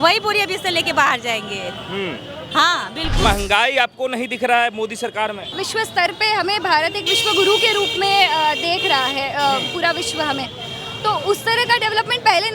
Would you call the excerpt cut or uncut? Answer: cut